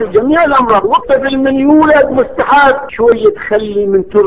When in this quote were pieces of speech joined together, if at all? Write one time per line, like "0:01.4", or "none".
0:02.9